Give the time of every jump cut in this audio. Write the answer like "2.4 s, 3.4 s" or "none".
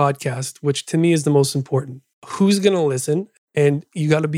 2.3 s, 3.3 s